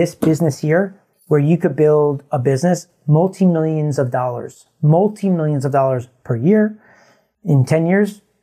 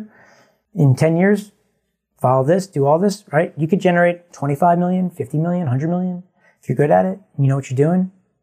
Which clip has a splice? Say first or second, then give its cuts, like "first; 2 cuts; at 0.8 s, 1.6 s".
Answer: first; 1 cut; at 1.0 s